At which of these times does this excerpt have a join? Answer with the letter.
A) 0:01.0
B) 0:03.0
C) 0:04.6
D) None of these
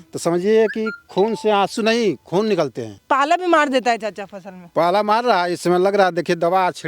B